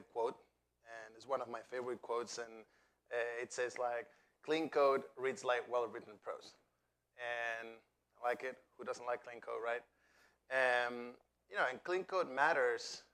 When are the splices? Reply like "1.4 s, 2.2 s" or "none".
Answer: none